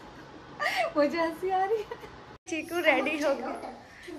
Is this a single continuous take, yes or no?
no